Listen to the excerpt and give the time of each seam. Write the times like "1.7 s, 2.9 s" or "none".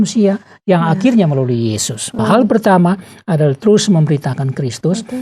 2.2 s